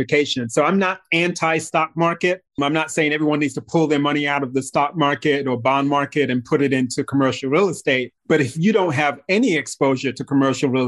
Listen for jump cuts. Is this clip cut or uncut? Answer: cut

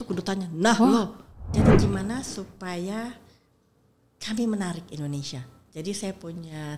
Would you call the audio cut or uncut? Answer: cut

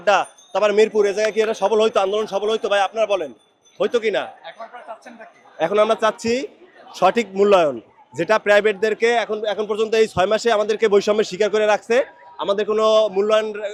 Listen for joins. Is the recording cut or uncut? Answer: uncut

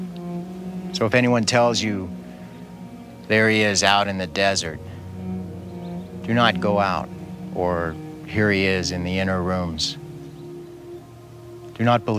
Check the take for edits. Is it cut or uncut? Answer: cut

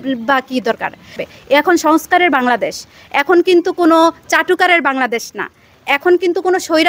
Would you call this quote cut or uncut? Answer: cut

